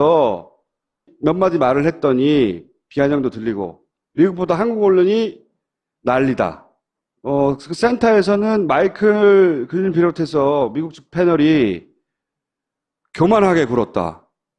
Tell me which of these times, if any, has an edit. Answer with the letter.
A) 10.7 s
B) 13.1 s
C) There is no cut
A